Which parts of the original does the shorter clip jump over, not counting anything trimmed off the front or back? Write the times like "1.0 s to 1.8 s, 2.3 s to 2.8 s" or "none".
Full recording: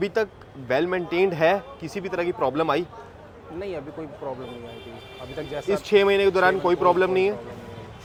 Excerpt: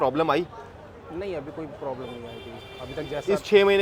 none